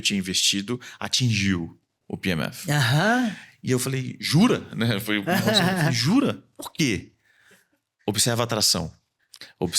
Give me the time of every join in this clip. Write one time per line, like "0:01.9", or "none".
none